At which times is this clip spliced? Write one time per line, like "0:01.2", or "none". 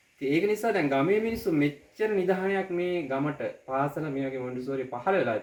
none